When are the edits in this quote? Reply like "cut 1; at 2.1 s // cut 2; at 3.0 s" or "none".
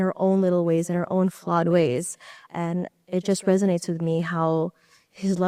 none